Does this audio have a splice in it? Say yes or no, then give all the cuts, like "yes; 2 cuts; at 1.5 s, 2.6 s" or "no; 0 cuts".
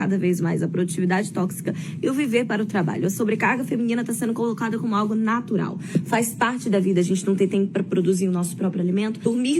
no; 0 cuts